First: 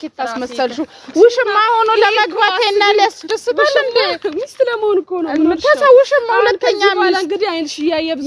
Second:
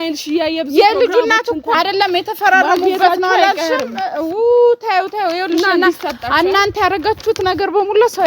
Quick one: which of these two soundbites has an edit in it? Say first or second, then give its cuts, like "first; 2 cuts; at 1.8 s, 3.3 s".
second; 1 cut; at 1.8 s